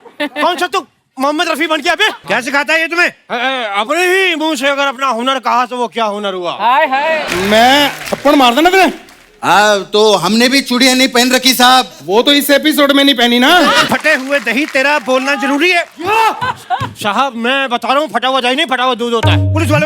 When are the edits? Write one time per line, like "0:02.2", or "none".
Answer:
0:02.2
0:07.3
0:13.8